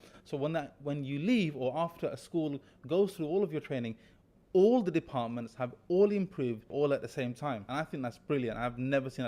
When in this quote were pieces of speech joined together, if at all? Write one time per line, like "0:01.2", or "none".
0:06.7
0:07.6